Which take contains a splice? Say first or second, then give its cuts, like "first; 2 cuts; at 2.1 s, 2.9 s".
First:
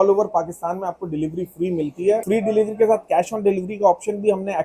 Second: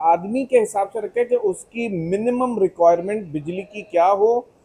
first; 1 cut; at 2.2 s